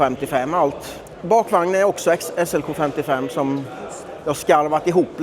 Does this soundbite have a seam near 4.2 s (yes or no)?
no